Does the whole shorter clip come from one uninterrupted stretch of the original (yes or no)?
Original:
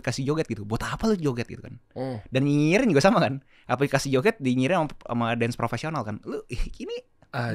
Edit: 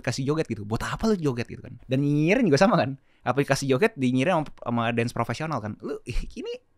no